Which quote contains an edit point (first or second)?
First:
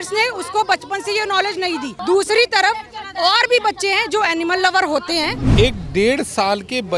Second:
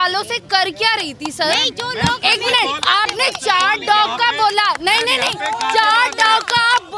first